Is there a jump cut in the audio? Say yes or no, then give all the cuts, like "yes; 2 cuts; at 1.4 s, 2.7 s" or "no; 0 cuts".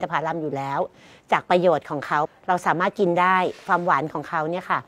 yes; 1 cut; at 2.3 s